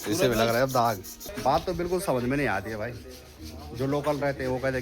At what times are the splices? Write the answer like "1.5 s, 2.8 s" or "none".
1.3 s